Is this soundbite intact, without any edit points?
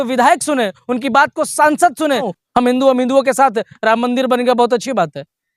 no; 1 cut; at 2.3 s

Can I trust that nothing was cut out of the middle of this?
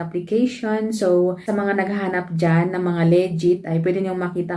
no; 1 cut; at 1.4 s

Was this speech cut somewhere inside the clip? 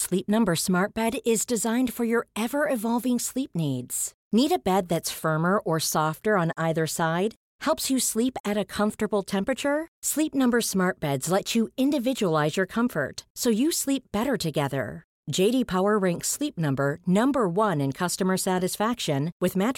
no; 0 cuts

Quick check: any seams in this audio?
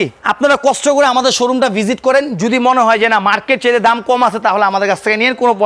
no; 0 cuts

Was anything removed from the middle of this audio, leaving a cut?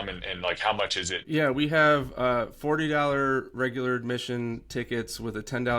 yes; 1 cut; at 1.1 s

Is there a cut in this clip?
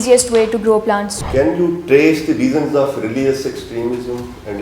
yes; 1 cut; at 1.2 s

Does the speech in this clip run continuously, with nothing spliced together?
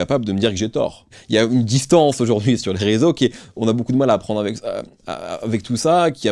yes; 0 cuts

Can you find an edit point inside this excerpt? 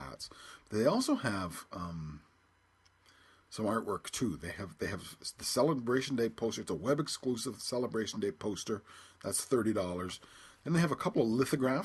no; 0 cuts

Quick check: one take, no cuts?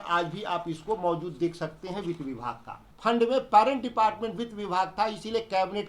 no; 1 cut; at 2.8 s

